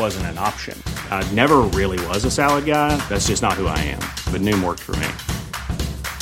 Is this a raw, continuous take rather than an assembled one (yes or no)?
yes